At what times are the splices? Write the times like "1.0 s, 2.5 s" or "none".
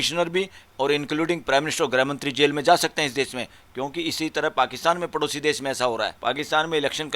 6.1 s